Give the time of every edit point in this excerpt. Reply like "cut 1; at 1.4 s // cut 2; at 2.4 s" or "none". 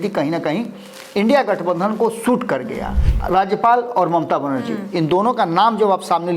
cut 1; at 3.0 s